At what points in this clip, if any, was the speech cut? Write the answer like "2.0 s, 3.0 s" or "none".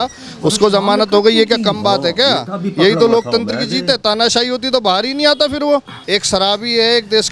6.1 s